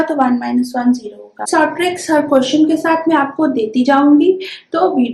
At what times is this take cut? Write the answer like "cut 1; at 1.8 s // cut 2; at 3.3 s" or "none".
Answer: cut 1; at 1.4 s